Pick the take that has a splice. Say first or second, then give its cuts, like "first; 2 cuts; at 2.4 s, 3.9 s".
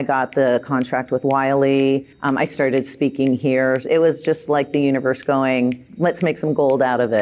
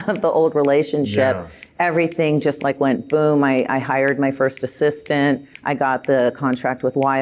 first; 2 cuts; at 3.8 s, 5.9 s